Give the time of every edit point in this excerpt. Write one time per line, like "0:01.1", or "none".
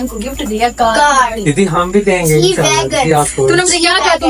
none